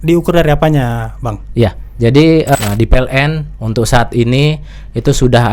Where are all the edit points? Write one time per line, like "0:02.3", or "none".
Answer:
0:02.5